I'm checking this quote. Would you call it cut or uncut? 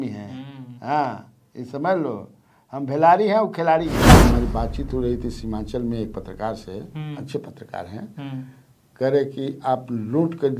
cut